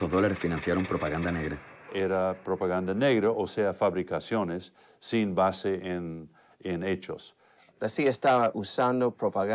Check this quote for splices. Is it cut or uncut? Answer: cut